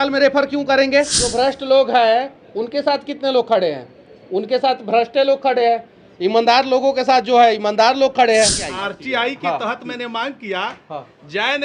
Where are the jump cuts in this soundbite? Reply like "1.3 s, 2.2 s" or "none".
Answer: 1.2 s, 8.6 s